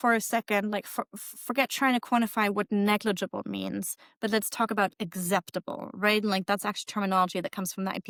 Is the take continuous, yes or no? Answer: yes